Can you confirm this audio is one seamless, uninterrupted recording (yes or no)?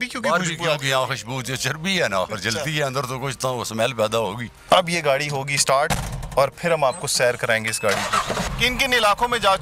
no